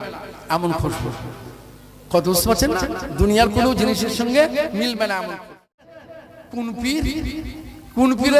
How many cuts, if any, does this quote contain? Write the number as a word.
one